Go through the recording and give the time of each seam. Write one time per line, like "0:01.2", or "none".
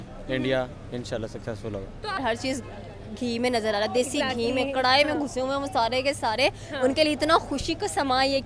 0:02.2